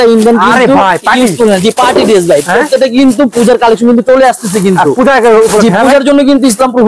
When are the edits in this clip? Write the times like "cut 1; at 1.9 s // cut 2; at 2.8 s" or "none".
none

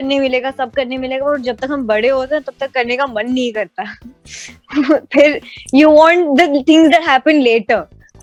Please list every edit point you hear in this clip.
none

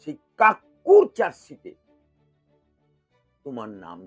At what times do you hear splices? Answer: none

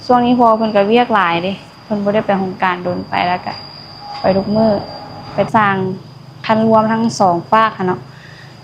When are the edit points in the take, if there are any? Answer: cut 1; at 5.5 s

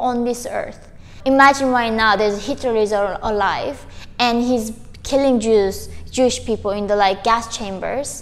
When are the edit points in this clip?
cut 1; at 1.1 s

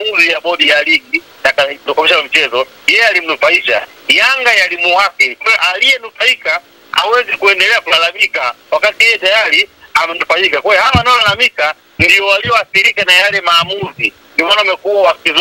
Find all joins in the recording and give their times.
none

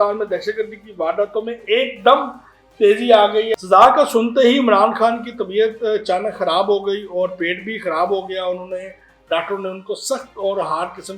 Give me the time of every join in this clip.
cut 1; at 3.5 s

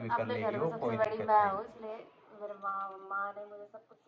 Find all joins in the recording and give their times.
none

